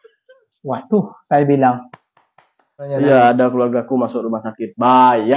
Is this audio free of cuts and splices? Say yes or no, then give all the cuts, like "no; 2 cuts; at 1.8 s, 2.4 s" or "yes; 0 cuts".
no; 1 cut; at 2.8 s